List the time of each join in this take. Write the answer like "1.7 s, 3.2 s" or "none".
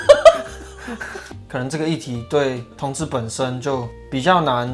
1.2 s